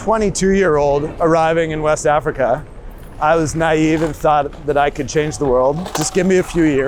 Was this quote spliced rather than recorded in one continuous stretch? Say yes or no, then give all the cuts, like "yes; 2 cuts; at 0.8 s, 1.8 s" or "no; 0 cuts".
no; 0 cuts